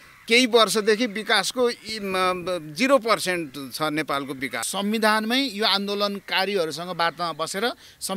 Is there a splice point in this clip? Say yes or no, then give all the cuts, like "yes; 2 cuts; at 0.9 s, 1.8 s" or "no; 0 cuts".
yes; 1 cut; at 4.6 s